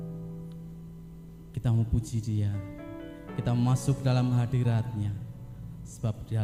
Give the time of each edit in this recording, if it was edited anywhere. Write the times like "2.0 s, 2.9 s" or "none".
none